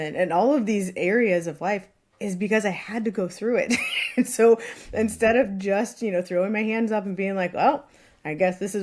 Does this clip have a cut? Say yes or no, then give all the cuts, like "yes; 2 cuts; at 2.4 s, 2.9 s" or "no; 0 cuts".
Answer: no; 0 cuts